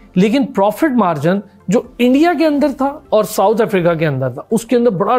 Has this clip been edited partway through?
no; 0 cuts

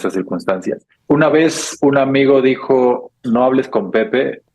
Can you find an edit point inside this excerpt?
yes; 1 cut; at 0.9 s

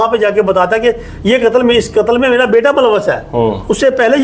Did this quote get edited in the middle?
no; 0 cuts

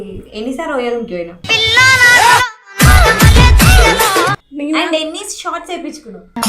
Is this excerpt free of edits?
no; 1 cut; at 1.3 s

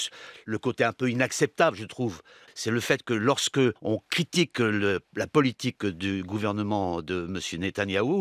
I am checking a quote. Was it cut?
yes; 2 cuts; at 2.4 s, 3.8 s

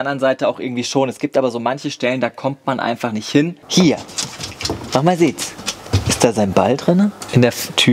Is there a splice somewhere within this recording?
yes; 2 cuts; at 3.6 s, 5.8 s

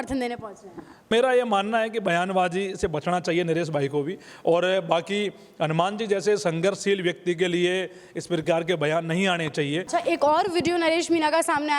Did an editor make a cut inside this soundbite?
yes; 2 cuts; at 1.0 s, 9.9 s

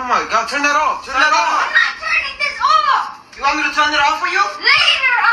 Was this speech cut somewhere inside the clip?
yes; 1 cut; at 3.5 s

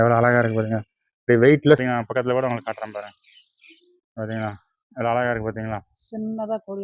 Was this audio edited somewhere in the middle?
yes; 1 cut; at 1.8 s

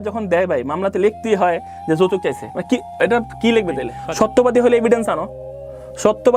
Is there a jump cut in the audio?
yes; 1 cut; at 4.0 s

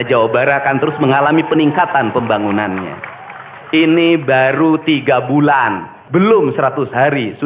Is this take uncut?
no; 1 cut; at 6.0 s

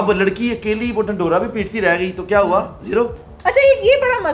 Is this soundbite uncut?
no; 1 cut; at 3.3 s

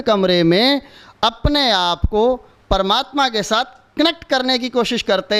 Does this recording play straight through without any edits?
yes; 0 cuts

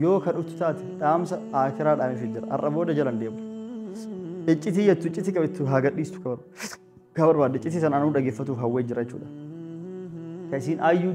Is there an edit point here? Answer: no; 0 cuts

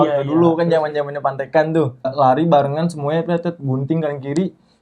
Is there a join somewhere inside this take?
yes; 1 cut; at 2.1 s

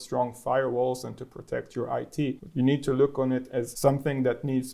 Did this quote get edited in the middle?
yes; 2 cuts; at 2.4 s, 3.7 s

